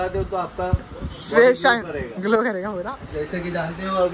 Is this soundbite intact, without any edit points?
no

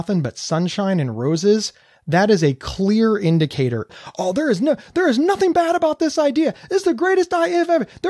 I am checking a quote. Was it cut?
no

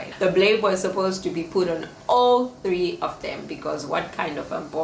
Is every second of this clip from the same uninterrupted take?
yes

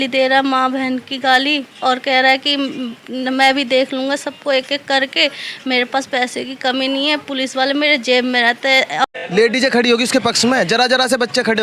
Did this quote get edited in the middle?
yes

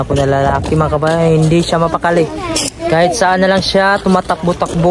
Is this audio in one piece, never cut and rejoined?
yes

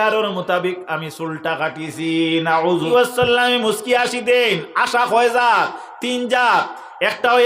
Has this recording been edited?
yes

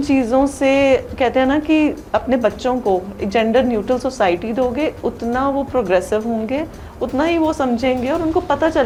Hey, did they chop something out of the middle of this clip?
no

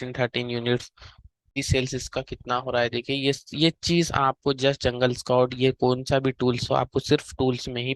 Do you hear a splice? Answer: yes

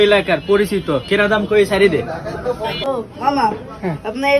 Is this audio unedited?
yes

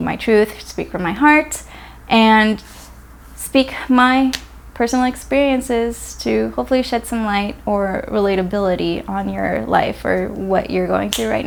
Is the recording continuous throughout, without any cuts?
yes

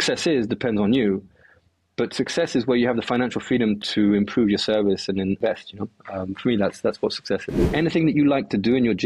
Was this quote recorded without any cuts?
no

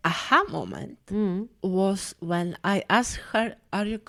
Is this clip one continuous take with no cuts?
yes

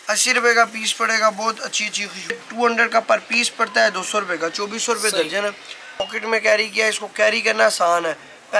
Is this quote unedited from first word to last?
no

